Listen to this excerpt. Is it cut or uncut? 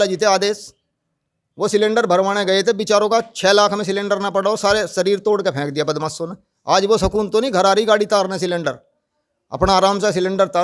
uncut